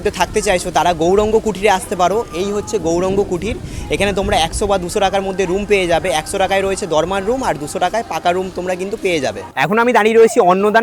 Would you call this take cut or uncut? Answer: uncut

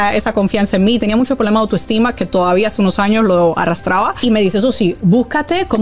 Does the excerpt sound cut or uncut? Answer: cut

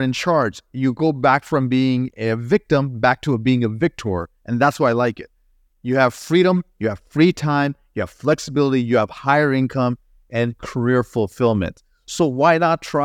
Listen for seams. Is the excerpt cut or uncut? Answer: uncut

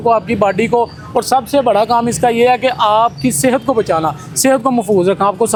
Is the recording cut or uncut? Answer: uncut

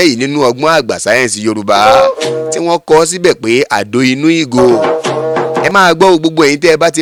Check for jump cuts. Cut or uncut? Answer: uncut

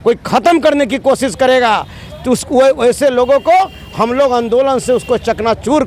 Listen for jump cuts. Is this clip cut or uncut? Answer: uncut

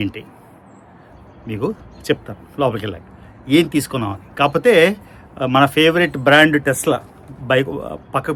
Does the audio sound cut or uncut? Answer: uncut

